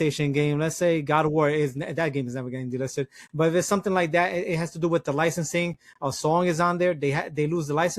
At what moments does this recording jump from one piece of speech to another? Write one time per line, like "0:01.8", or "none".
none